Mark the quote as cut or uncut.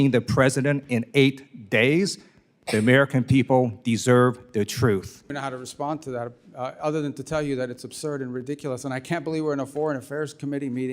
cut